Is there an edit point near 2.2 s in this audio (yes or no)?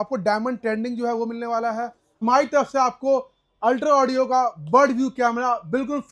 yes